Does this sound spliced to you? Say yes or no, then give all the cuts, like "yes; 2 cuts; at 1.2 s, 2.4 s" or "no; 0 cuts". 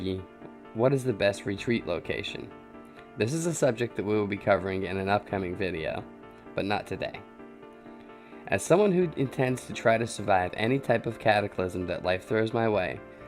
yes; 1 cut; at 5.1 s